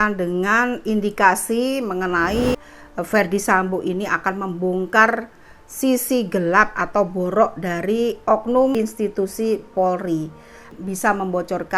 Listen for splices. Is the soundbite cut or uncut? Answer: cut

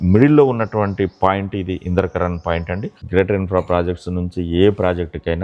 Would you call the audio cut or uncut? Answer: cut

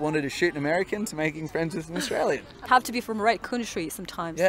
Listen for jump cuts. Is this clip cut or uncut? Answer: uncut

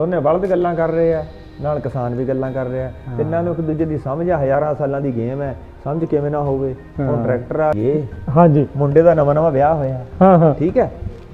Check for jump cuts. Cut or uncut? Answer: cut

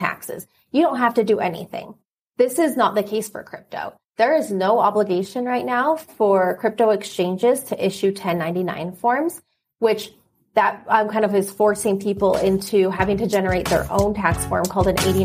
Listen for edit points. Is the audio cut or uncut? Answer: uncut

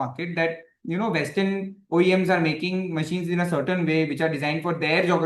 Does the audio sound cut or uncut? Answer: uncut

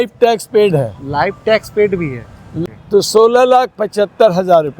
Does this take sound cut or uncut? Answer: cut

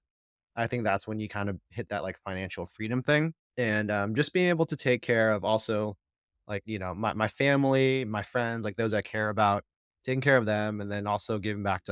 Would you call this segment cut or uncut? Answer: uncut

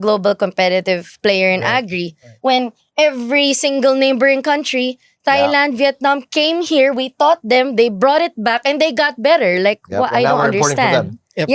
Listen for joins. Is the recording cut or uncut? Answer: uncut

